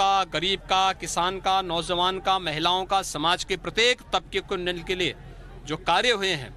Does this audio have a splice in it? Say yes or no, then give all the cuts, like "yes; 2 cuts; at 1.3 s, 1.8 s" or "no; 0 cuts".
no; 0 cuts